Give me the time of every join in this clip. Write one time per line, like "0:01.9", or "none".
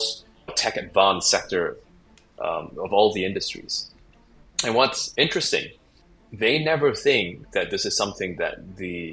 none